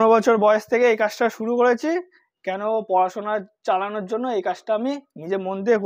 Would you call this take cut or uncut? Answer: uncut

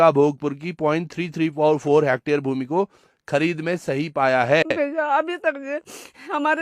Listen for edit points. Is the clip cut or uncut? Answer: cut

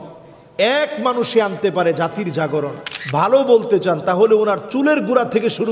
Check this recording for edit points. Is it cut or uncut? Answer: cut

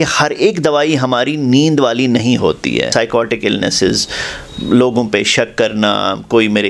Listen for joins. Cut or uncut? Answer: cut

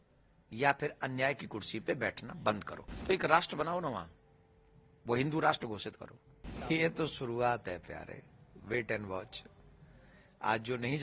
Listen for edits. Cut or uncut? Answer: cut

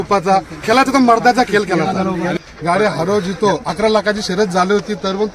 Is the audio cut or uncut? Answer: cut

